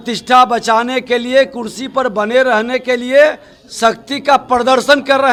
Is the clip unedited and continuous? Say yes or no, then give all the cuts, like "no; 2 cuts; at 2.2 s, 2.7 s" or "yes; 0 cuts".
yes; 0 cuts